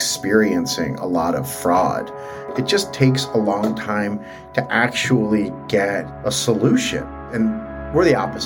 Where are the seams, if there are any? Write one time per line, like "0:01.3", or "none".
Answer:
0:02.5
0:06.1
0:07.2

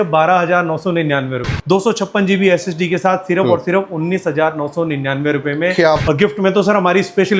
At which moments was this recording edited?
0:01.5
0:06.0

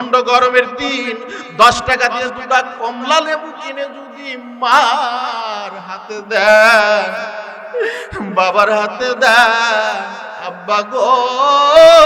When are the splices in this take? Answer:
none

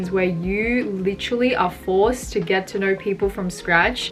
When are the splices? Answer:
none

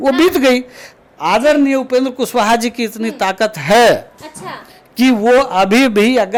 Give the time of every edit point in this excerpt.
none

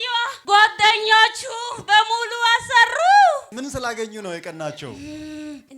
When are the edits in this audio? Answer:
0:03.5

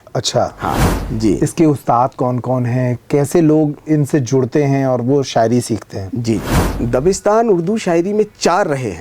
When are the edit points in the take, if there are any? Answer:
0:01.0
0:06.7

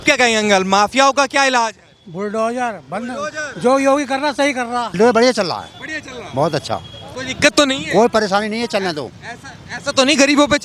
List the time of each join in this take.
0:04.9

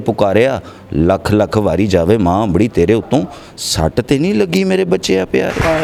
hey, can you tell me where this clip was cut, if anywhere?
none

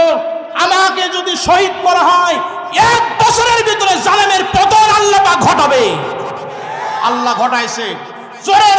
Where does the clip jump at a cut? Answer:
none

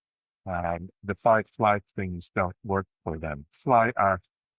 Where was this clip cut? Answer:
0:03.6

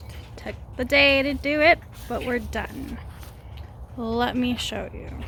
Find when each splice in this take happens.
none

